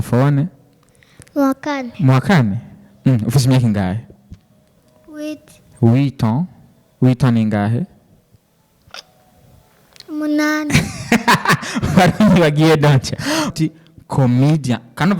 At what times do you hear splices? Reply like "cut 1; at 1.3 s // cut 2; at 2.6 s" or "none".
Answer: cut 1; at 13.5 s